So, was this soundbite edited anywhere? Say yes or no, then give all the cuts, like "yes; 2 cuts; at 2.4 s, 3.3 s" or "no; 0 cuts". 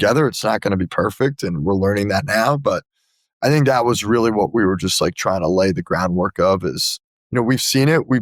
no; 0 cuts